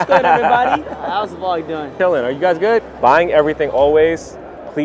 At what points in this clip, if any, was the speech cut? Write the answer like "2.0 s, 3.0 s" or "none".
1.9 s, 2.9 s

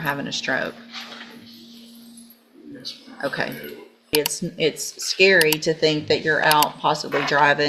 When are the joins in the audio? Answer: 4.1 s

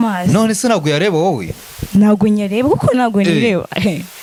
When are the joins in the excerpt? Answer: none

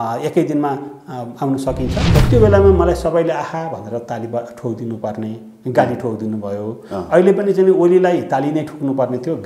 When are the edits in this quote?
2.1 s

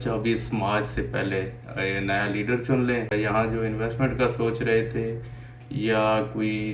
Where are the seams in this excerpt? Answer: 3.1 s

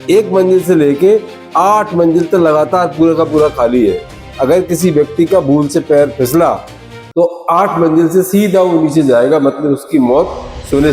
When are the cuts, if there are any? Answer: none

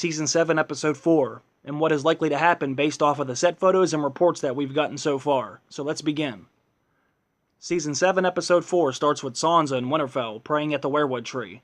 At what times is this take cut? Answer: 9.6 s

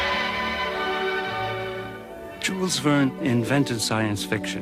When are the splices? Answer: 3.7 s

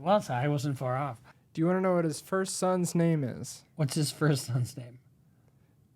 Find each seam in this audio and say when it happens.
1.2 s

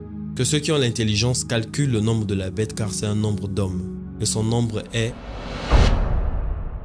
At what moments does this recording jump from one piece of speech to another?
5.3 s

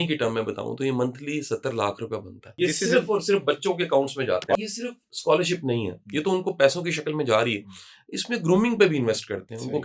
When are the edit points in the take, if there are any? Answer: 2.5 s, 4.5 s

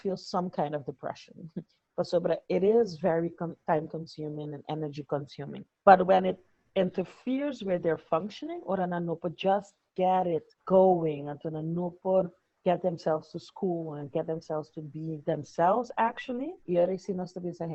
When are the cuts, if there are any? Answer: none

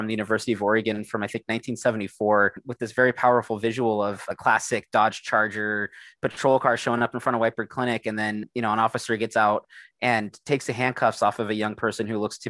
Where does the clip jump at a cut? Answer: 2.6 s, 4.3 s

